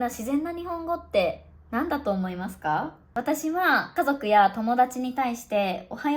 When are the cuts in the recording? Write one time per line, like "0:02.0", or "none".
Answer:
0:03.0
0:03.9